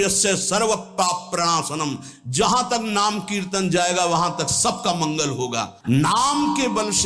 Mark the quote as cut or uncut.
cut